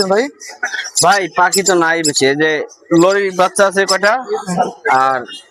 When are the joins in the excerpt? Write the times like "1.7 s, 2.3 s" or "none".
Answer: none